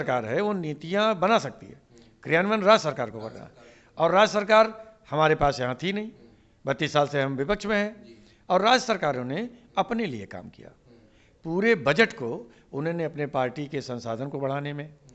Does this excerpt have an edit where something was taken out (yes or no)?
no